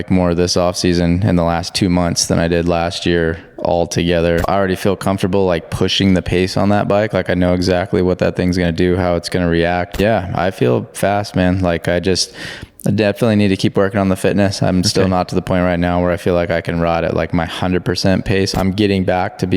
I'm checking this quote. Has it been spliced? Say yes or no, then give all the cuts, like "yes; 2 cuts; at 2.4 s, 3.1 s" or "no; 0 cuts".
yes; 3 cuts; at 4.4 s, 10.0 s, 18.5 s